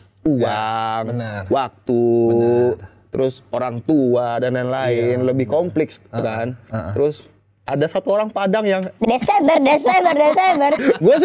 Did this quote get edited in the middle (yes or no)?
no